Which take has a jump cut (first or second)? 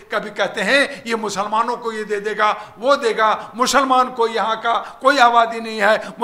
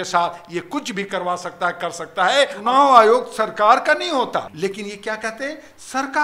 second